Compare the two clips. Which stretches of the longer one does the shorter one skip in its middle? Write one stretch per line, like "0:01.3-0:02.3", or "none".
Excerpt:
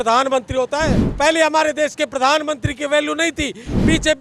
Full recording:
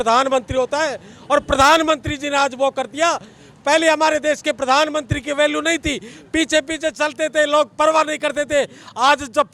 0:01.0-0:03.5